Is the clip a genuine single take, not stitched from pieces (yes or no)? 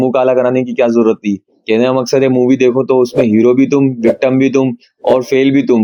yes